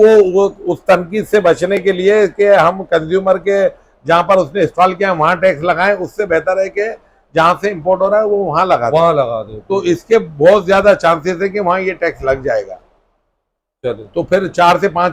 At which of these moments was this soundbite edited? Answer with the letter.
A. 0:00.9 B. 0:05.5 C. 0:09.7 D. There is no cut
D